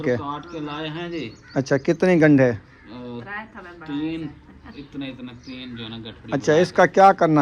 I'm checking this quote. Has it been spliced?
no; 0 cuts

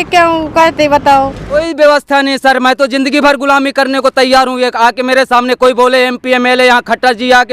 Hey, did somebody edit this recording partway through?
yes; 1 cut; at 1.6 s

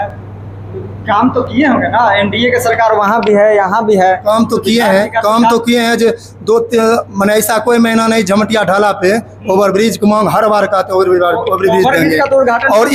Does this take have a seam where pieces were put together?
no; 0 cuts

